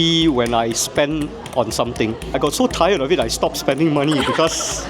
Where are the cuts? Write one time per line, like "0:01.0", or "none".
0:02.4